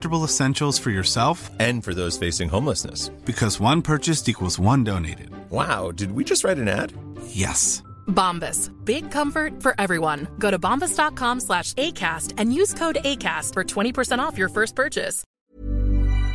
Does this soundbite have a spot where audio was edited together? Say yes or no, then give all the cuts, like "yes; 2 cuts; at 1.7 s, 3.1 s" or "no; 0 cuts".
yes; 1 cut; at 15.4 s